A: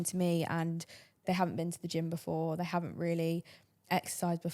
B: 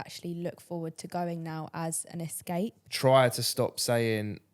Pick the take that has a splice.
B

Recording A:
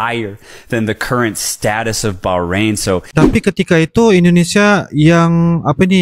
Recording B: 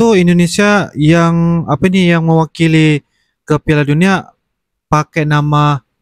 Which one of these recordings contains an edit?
A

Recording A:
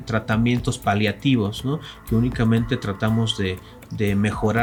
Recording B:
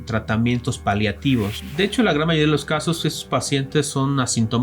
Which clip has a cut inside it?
B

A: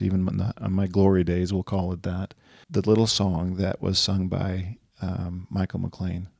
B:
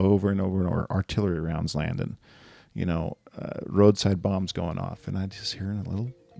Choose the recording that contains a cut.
A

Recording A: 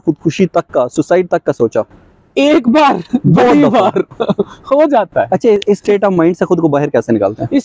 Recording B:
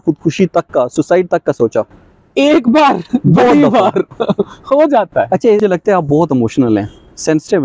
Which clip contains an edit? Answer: B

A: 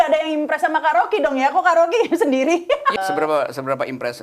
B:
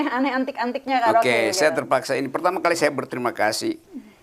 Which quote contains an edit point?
A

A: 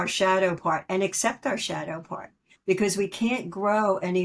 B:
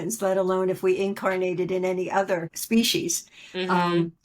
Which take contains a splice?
B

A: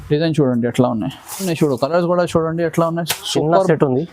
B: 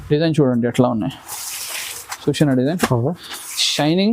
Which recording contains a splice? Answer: A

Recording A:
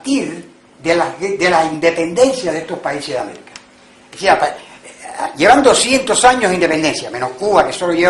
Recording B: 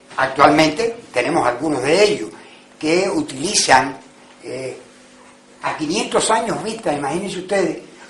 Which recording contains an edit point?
B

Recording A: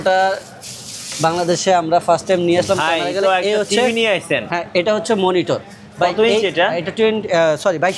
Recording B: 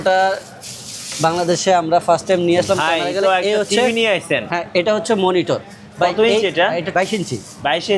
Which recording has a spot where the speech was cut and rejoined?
B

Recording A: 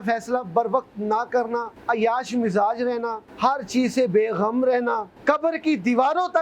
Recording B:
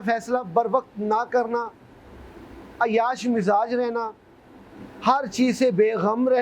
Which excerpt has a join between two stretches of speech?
A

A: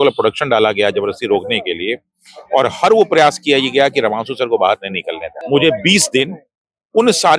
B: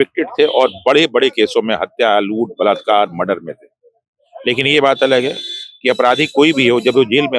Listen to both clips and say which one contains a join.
A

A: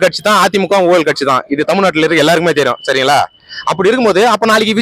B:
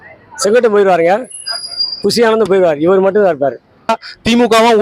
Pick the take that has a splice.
B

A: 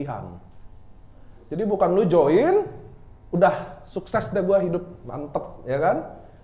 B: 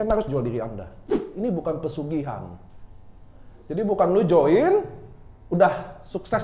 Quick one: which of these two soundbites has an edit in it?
B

